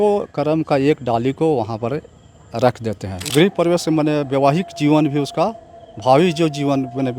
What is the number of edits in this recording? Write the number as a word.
one